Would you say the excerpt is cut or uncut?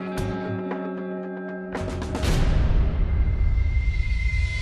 cut